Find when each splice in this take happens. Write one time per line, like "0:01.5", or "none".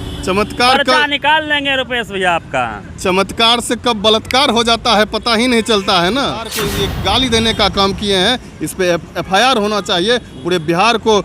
0:06.6